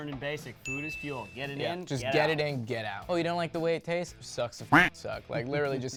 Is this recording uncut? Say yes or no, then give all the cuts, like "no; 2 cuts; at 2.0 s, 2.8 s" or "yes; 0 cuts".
yes; 0 cuts